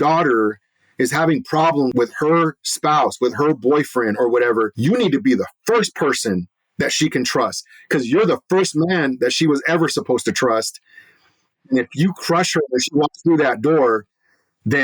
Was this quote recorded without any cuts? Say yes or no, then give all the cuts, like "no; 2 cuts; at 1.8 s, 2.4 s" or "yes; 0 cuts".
no; 2 cuts; at 1.9 s, 4.7 s